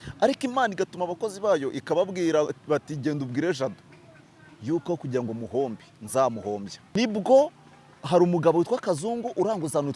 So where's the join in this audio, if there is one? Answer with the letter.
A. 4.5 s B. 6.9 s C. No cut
B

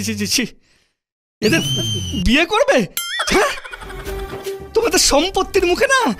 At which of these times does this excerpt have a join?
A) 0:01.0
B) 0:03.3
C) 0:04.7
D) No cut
D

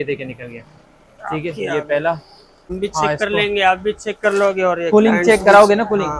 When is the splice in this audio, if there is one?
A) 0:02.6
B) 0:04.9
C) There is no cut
A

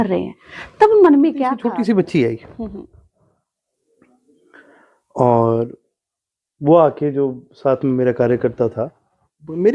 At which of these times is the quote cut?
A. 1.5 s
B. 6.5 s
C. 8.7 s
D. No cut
A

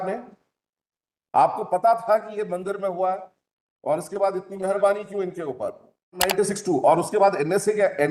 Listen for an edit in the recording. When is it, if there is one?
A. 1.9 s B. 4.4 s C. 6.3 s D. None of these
C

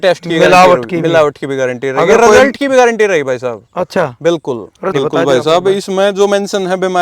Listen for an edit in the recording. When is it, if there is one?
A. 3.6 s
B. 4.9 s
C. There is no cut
B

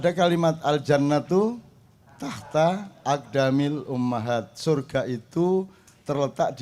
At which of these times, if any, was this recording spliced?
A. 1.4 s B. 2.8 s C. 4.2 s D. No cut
D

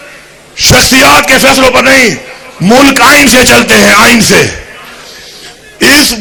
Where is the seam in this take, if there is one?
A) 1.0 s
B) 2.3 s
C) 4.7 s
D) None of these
D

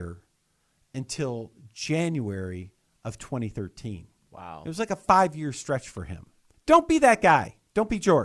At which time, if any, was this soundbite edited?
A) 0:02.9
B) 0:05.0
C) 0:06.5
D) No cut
C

